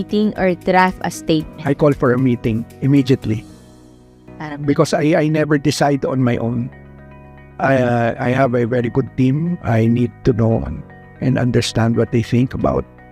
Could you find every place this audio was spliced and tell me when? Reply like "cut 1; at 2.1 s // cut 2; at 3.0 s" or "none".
none